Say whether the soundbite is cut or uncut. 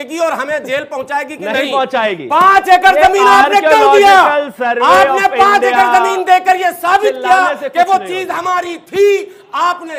uncut